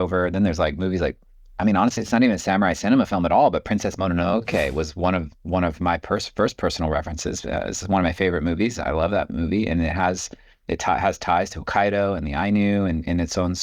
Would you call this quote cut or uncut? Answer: uncut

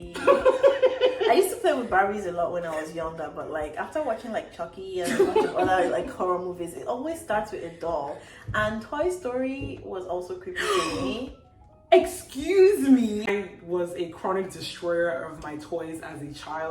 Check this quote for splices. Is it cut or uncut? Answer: cut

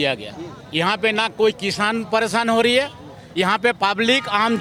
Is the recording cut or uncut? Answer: uncut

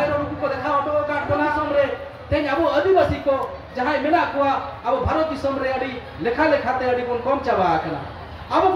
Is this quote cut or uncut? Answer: cut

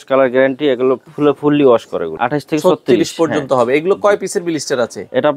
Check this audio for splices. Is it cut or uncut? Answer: cut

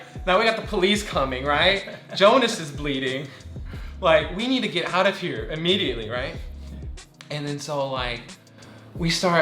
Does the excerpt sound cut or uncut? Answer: uncut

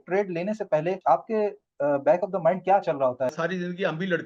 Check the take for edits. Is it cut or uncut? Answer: cut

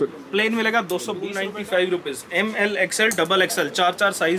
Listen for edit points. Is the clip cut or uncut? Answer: cut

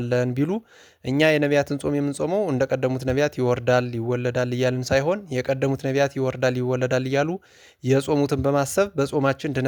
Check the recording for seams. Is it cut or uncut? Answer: uncut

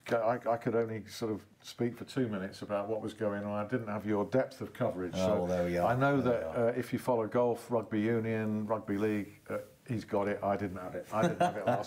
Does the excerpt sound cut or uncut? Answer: uncut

